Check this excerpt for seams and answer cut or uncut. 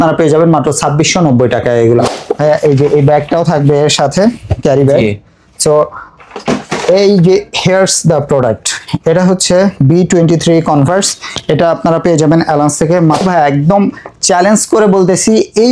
cut